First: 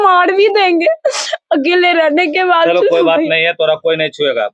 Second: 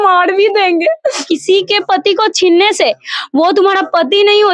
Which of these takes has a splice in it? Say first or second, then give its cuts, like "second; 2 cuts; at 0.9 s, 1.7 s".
second; 1 cut; at 1.2 s